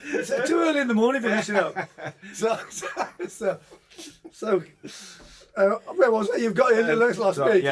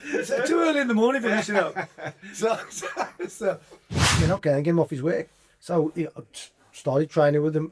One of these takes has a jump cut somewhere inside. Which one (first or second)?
second